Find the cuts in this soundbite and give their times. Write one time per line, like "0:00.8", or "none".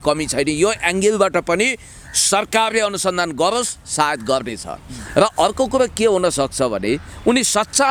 none

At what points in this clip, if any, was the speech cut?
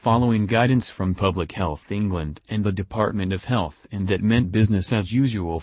none

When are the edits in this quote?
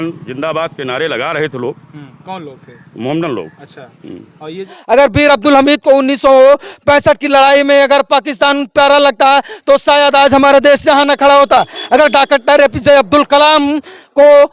0:04.7

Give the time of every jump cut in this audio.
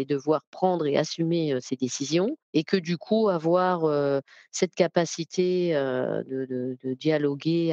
0:02.4

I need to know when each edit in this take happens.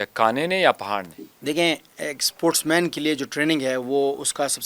none

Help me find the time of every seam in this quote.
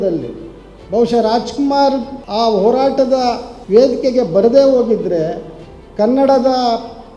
0:02.2
0:03.5

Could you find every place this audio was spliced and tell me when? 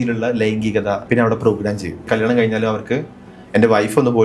0:01.0
0:02.0

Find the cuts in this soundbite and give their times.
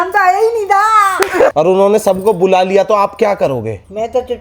0:01.5

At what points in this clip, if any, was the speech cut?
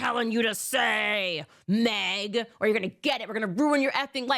0:02.7

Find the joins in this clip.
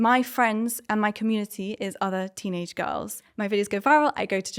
0:03.2

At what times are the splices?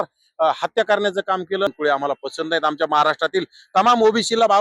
0:01.7

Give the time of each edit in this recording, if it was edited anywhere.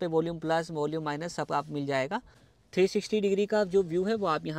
0:02.4

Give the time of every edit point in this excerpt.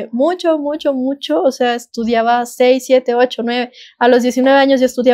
none

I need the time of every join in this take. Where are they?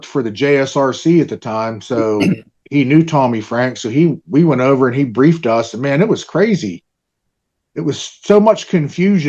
none

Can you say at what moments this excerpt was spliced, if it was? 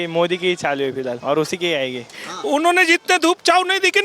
0:01.2
0:02.2

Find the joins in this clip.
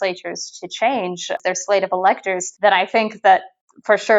0:01.3
0:02.4

